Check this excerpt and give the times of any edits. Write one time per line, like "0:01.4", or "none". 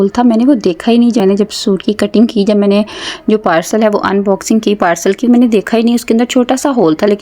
0:01.2